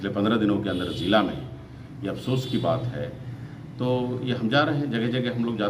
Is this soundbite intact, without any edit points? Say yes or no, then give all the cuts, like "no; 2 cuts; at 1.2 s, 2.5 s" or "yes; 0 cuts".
yes; 0 cuts